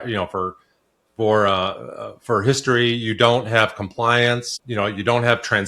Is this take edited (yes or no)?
yes